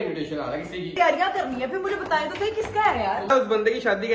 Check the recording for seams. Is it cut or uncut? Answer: cut